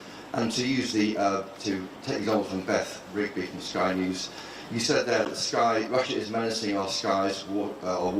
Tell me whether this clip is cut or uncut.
uncut